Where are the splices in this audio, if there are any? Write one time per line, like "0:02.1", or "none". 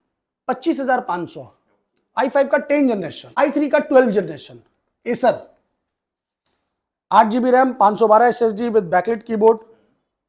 0:03.2